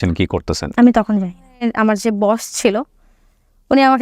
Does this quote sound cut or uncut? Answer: cut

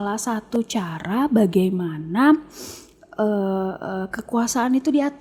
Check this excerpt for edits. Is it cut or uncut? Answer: uncut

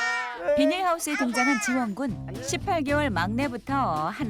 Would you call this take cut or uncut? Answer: cut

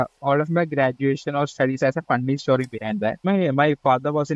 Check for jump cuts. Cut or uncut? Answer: cut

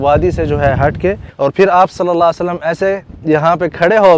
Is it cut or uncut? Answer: cut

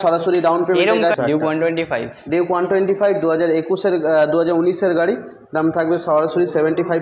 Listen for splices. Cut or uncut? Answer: cut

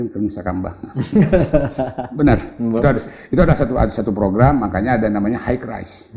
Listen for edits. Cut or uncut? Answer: uncut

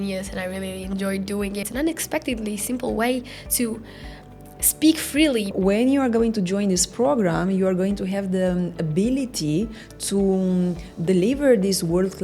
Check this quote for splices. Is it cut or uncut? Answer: cut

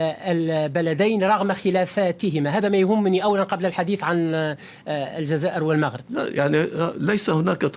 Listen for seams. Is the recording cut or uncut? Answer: uncut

